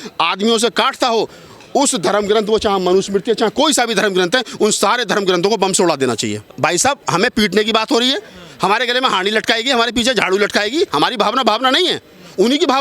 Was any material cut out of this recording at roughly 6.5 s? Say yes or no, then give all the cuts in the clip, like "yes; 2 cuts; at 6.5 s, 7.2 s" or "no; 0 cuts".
yes; 1 cut; at 6.5 s